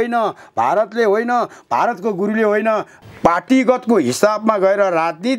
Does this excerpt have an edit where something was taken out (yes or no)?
yes